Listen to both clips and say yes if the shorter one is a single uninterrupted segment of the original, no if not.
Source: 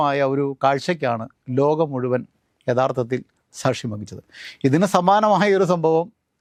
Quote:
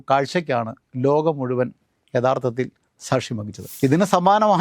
no